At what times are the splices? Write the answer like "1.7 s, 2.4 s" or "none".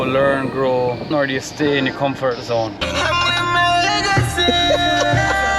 1.0 s, 2.8 s